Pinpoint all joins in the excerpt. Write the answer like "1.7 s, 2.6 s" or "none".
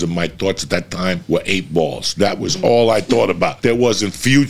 1.2 s, 3.6 s